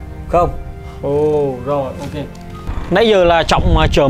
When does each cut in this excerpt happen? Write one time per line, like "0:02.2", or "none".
0:02.7